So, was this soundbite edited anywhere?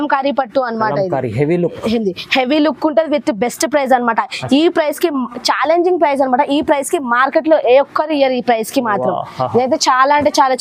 no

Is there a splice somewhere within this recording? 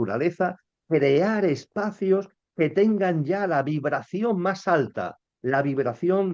no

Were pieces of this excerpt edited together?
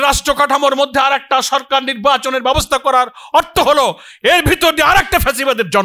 no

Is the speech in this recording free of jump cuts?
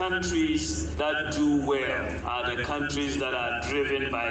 no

